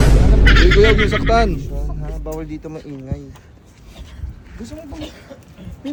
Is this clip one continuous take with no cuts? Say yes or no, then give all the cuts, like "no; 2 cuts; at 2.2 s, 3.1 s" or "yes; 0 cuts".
yes; 0 cuts